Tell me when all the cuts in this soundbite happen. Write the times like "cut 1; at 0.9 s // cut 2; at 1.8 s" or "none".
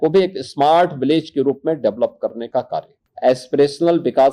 cut 1; at 3.0 s